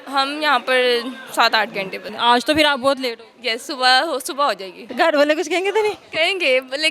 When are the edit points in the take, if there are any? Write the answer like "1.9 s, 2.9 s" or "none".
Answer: 2.1 s, 4.9 s